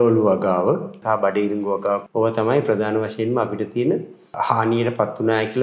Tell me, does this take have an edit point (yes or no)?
yes